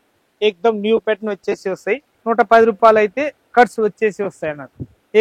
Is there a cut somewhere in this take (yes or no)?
yes